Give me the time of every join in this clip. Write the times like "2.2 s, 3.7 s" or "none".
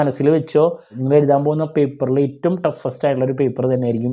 0.9 s